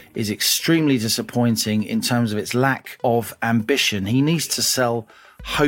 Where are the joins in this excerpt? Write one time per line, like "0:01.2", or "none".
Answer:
0:03.1